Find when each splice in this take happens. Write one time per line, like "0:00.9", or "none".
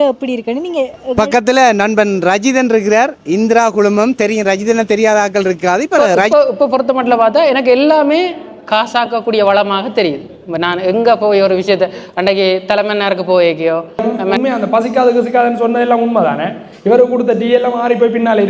0:01.1
0:06.2
0:14.2